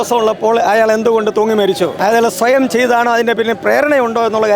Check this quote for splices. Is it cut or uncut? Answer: cut